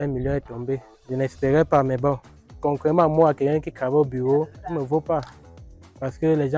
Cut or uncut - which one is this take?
cut